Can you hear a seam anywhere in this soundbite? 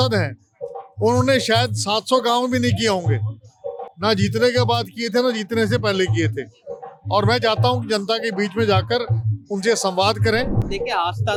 no; 0 cuts

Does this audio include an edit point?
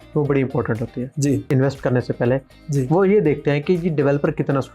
yes; 1 cut; at 1.5 s

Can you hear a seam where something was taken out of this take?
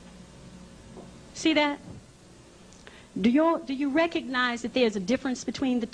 yes; 1 cut; at 3.0 s

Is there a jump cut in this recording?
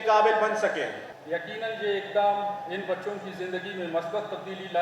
yes; 1 cut; at 1.1 s

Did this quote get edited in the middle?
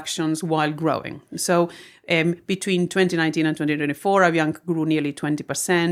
no; 0 cuts

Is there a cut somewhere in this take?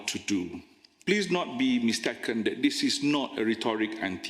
yes; 1 cut; at 0.9 s

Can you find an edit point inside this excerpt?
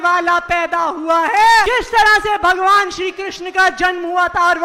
yes; 1 cut; at 1.7 s

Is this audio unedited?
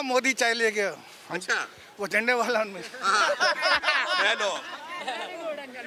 yes; 0 cuts

